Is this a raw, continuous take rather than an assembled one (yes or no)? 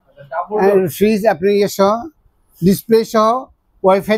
yes